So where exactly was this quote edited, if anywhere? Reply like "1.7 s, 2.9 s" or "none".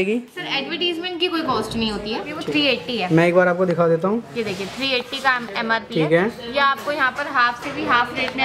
2.3 s